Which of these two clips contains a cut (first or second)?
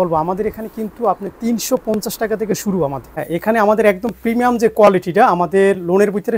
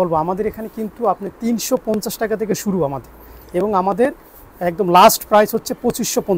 first